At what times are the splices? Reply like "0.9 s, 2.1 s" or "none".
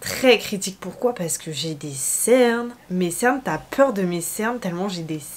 2.8 s